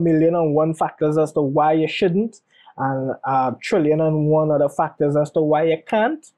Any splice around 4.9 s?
no; 0 cuts

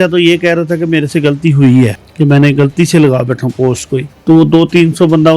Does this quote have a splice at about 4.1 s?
yes; 2 cuts; at 2.0 s, 4.1 s

